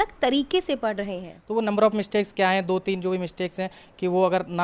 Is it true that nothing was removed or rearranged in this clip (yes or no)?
no